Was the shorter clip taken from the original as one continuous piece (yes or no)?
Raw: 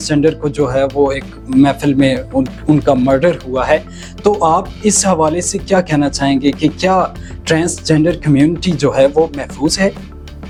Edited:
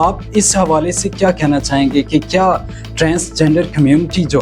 yes